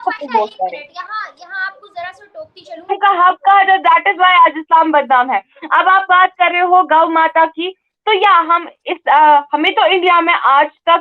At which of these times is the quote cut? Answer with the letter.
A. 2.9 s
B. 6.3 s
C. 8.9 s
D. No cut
A